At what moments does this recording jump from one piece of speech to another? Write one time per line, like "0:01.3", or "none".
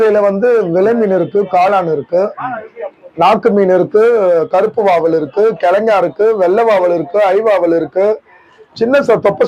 none

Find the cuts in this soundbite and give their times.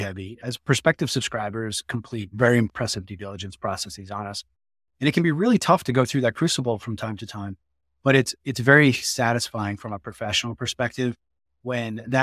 0:02.7

